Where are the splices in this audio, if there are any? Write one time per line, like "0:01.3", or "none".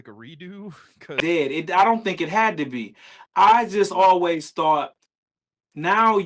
0:01.1